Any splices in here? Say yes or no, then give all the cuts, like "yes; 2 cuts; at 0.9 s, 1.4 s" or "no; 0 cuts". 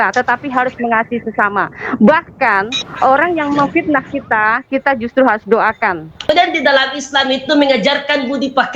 yes; 1 cut; at 6.3 s